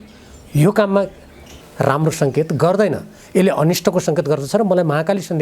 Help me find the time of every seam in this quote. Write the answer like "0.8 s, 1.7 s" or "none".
1.6 s

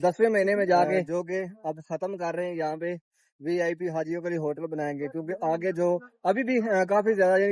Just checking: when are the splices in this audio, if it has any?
1.1 s

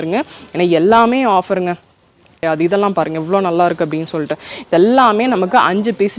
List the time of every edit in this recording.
2.4 s

